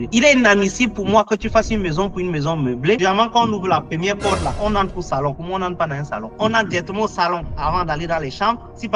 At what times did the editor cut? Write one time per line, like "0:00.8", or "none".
0:06.3